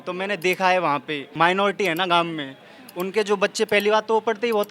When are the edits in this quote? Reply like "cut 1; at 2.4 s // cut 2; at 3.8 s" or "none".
cut 1; at 1.3 s